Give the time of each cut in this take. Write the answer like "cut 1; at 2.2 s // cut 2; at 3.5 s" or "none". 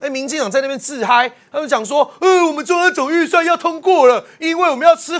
none